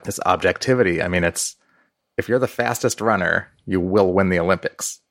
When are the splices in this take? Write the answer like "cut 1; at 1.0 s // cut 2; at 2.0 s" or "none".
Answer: none